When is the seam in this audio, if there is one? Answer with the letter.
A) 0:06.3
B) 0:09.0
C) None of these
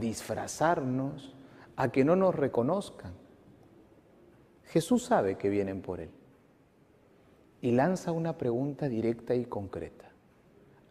C